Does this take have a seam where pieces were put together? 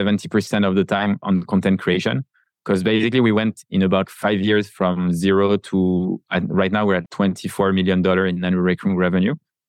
yes; 2 cuts; at 4.1 s, 7.0 s

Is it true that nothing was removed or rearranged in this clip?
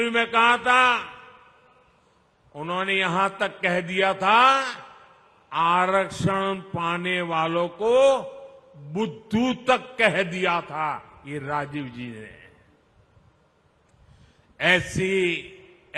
yes; 0 cuts

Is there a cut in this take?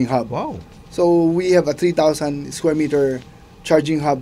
no; 0 cuts

